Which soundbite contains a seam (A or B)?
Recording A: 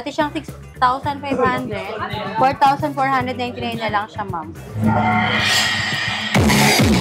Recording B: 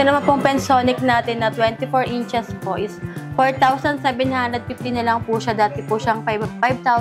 A